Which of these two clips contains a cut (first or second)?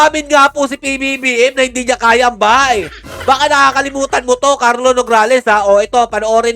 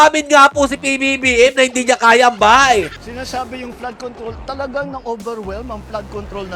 second